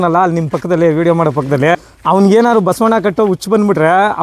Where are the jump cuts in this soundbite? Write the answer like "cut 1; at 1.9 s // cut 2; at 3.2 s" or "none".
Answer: cut 1; at 1.8 s